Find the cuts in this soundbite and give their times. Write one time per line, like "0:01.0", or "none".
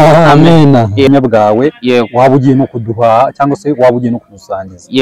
0:01.1